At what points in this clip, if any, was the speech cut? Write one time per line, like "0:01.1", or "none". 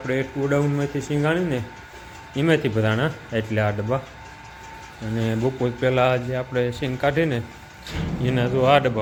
none